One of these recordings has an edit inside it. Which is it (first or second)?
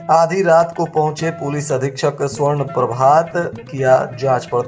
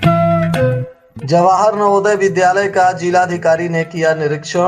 second